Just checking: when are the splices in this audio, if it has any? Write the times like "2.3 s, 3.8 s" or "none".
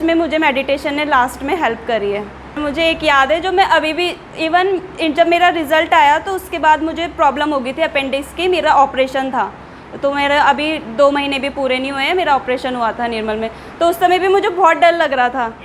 none